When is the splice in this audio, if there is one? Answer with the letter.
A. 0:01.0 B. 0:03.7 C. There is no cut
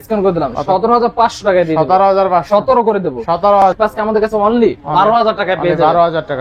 B